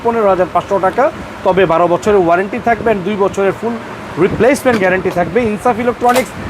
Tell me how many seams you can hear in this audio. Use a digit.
0